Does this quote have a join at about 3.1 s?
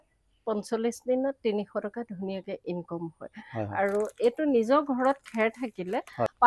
no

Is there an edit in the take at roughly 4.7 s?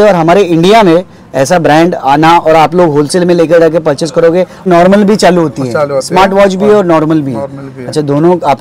yes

